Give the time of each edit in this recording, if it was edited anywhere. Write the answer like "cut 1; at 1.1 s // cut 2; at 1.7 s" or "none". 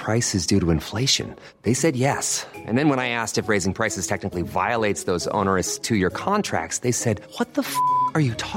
none